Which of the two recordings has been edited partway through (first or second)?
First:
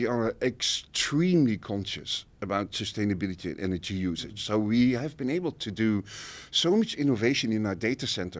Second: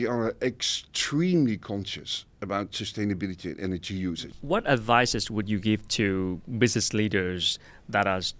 second